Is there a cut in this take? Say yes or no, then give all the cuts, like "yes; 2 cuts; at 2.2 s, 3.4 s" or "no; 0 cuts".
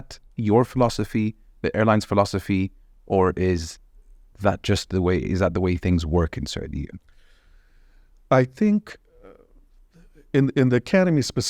no; 0 cuts